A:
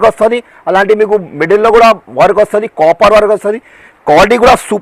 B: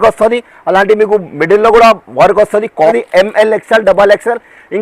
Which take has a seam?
B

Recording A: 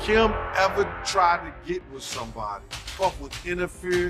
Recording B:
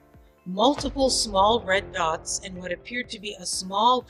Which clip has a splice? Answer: A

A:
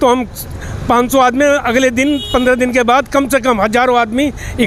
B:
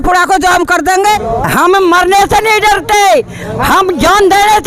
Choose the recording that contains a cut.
B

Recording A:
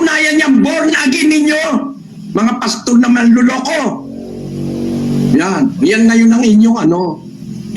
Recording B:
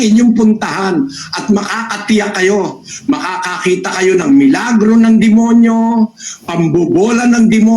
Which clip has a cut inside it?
A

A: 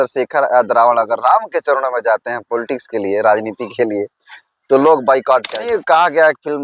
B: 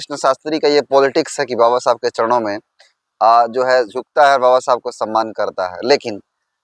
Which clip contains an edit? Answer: A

